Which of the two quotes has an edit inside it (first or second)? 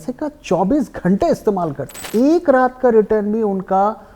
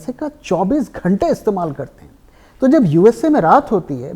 first